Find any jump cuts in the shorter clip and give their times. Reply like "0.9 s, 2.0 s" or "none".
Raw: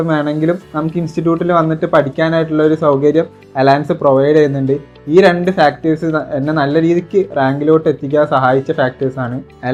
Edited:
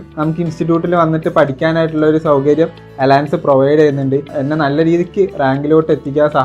4.4 s